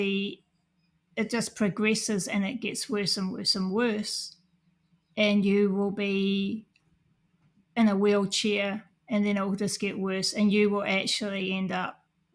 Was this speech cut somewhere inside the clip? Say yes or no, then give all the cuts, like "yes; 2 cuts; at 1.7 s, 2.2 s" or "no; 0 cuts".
no; 0 cuts